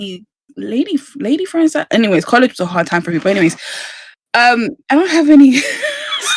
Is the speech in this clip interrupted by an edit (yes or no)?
no